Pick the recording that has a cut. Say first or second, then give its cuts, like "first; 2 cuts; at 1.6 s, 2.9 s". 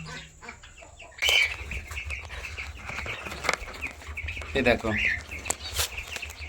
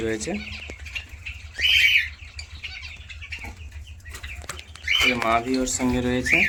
first; 1 cut; at 1.2 s